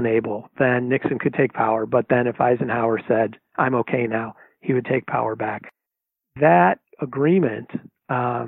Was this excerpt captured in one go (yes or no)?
yes